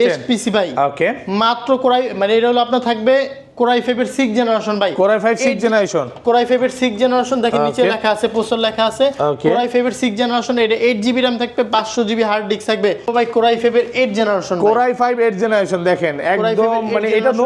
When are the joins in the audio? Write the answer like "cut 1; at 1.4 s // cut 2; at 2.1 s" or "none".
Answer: cut 1; at 13.1 s